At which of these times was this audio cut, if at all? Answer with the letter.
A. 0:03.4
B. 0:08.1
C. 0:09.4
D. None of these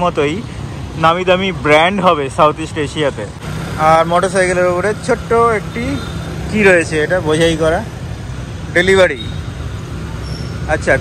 D